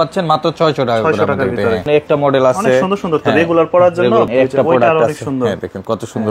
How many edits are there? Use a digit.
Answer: 2